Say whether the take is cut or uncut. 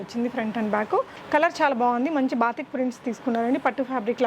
cut